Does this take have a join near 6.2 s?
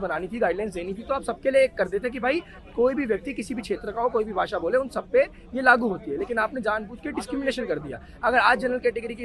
no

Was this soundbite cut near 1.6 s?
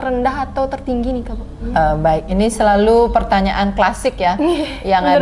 yes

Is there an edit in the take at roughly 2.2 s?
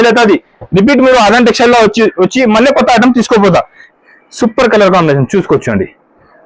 no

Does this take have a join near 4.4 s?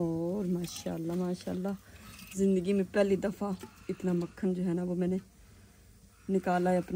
no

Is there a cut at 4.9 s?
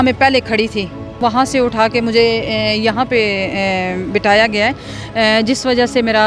no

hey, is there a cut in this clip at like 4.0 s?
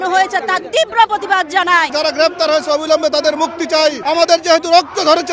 yes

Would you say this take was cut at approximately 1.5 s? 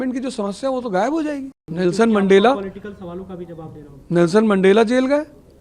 yes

